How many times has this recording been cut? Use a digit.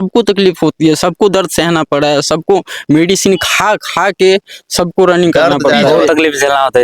1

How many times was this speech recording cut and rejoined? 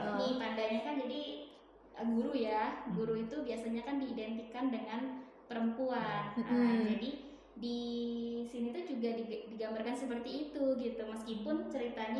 0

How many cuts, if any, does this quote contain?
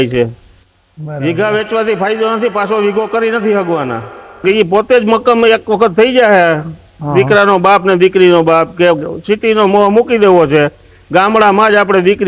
1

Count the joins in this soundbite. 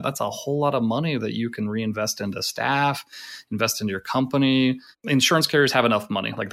1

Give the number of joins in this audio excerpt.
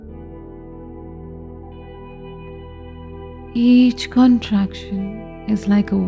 1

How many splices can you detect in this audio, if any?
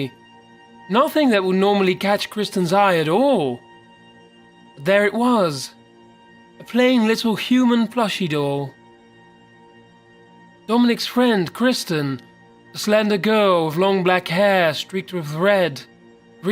1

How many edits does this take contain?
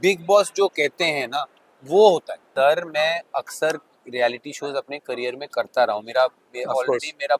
1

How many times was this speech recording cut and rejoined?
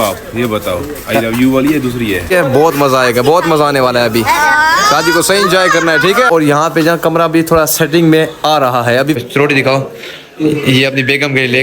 3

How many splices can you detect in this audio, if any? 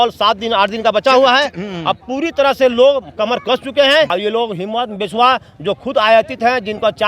1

